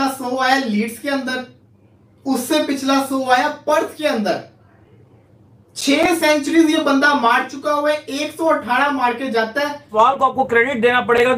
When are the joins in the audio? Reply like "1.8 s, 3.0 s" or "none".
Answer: 10.0 s